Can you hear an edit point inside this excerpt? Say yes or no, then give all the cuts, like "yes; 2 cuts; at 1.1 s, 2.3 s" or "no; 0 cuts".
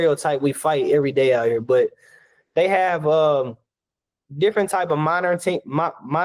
no; 0 cuts